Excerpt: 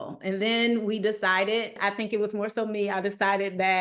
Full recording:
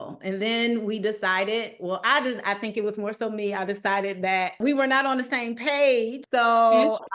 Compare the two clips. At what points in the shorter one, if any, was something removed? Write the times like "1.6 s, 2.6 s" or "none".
1.8 s